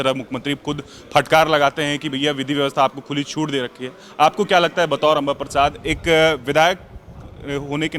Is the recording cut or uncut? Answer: uncut